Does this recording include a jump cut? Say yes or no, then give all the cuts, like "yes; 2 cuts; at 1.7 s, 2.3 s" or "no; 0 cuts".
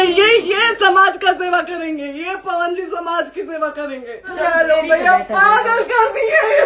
yes; 1 cut; at 4.2 s